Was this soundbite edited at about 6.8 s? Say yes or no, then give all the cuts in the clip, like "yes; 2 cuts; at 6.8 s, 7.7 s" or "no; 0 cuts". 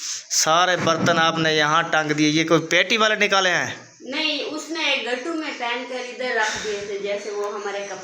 no; 0 cuts